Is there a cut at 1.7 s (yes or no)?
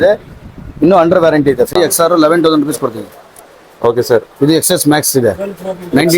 yes